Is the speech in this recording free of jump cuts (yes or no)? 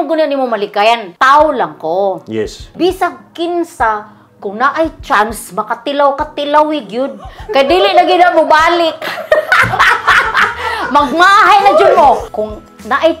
no